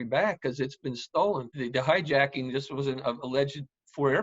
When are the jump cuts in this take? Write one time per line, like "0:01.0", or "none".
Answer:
0:01.5